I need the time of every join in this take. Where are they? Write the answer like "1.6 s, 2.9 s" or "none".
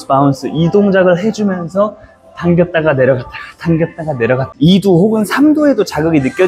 4.5 s